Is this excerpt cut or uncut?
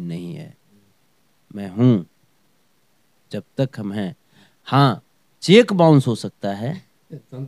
uncut